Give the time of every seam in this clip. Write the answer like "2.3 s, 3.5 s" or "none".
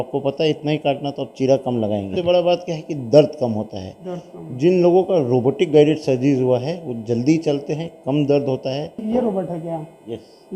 2.1 s, 9.0 s